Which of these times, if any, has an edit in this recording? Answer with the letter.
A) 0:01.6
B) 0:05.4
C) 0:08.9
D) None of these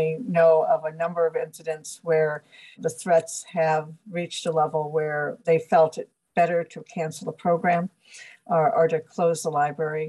B